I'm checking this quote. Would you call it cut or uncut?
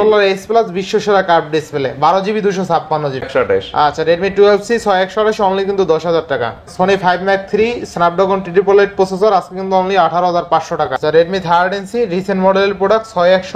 cut